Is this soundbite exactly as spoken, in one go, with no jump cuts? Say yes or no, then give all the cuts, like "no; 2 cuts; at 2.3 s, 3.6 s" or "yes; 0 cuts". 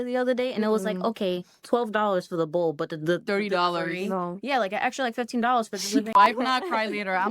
no; 1 cut; at 6.1 s